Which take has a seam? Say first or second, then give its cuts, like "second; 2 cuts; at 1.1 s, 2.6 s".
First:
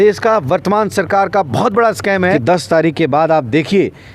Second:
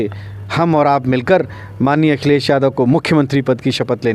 first; 1 cut; at 2.4 s